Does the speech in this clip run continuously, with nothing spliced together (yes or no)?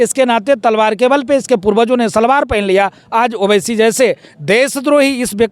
yes